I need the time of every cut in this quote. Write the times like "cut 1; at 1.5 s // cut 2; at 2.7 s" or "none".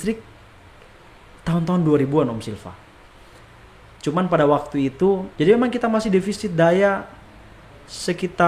cut 1; at 5.3 s